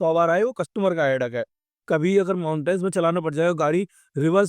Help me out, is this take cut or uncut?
cut